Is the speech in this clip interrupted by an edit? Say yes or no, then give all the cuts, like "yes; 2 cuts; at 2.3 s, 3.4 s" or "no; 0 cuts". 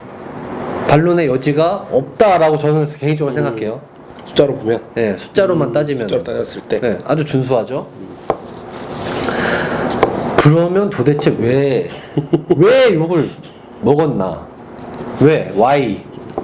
no; 0 cuts